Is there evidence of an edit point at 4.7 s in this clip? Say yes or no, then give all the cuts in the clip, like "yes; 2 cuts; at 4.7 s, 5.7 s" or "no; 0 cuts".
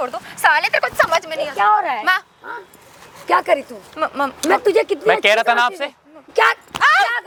no; 0 cuts